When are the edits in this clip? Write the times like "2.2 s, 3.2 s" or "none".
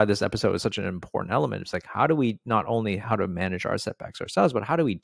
none